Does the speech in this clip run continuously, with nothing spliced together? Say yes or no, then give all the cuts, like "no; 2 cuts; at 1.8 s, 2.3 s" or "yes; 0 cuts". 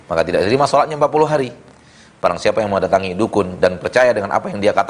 yes; 0 cuts